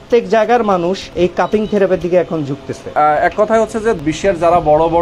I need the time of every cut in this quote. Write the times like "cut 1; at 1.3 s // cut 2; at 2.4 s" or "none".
cut 1; at 1.0 s // cut 2; at 2.9 s // cut 3; at 4.0 s